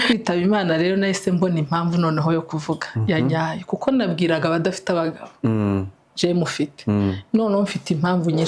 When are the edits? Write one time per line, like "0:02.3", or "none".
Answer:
none